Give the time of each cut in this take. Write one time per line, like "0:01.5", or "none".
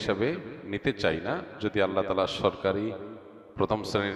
none